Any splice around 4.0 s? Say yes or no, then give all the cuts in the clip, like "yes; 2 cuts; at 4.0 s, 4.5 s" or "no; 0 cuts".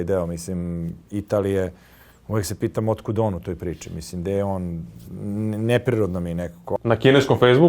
no; 1 cut; at 6.7 s